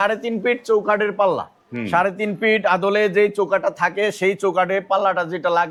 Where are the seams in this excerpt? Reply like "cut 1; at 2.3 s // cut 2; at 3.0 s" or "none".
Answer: none